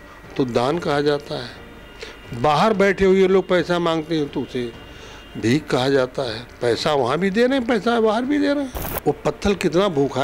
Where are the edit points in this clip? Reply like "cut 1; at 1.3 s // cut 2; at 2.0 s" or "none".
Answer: cut 1; at 8.8 s